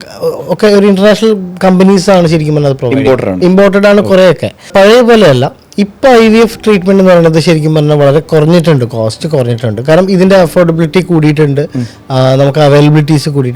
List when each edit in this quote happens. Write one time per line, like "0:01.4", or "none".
0:04.7